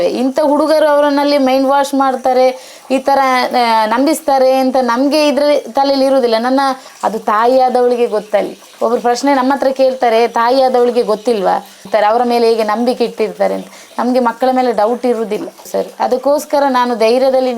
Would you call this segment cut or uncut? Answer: cut